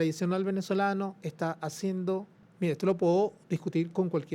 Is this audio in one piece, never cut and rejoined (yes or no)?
no